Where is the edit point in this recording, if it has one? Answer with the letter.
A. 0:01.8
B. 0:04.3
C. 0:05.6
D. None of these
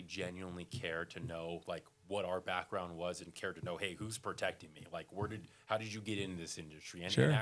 D